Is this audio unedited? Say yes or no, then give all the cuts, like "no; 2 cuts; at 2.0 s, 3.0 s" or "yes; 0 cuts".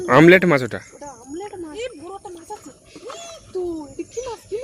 no; 1 cut; at 1.7 s